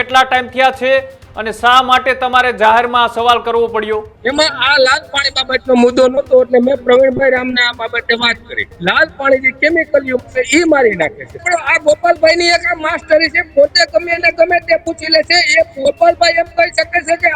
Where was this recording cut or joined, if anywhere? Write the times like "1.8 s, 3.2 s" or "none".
4.1 s, 8.7 s, 11.4 s